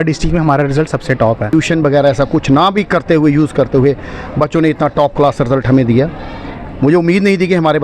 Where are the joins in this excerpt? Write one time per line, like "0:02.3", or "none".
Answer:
0:01.5